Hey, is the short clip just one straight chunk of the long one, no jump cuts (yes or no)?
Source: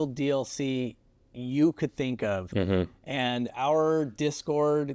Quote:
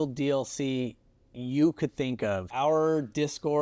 no